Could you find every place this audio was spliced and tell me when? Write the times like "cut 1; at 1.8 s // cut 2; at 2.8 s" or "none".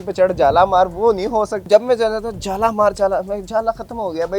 cut 1; at 1.7 s